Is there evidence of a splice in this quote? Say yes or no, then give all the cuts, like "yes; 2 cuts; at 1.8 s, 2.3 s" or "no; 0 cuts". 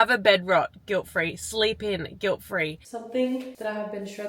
yes; 2 cuts; at 2.8 s, 3.5 s